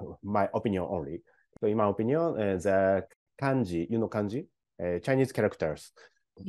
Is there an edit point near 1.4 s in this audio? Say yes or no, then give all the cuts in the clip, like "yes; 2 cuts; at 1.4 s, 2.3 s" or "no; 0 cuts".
yes; 1 cut; at 1.4 s